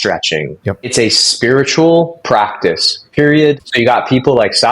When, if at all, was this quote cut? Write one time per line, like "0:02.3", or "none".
0:00.9
0:03.7